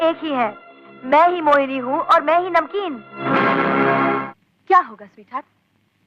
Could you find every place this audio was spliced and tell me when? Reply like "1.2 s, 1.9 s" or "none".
4.2 s